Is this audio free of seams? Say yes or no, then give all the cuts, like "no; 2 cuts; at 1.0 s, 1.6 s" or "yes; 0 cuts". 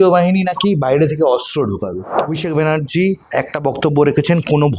no; 1 cut; at 2.1 s